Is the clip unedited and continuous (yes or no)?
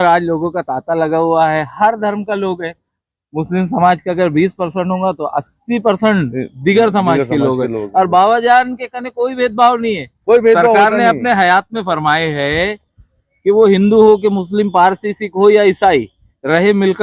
yes